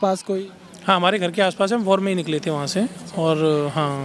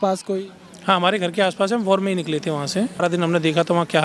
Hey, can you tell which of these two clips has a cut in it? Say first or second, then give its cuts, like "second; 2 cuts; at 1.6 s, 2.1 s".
second; 1 cut; at 3.0 s